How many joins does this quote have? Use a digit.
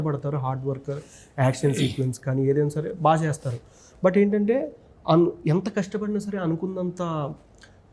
0